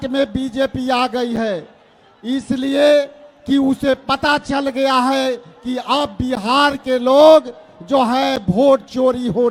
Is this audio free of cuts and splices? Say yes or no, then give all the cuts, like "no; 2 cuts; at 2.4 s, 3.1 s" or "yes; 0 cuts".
yes; 0 cuts